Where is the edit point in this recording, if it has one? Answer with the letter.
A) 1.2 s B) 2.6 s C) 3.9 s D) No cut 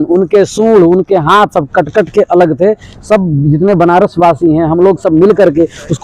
D